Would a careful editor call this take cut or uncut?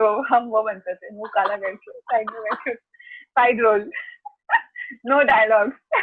uncut